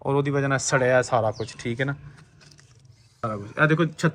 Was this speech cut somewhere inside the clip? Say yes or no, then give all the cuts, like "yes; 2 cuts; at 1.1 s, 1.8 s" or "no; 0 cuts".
yes; 1 cut; at 3.2 s